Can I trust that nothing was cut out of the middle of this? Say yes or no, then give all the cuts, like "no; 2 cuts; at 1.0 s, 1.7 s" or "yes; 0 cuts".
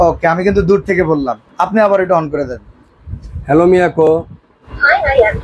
yes; 0 cuts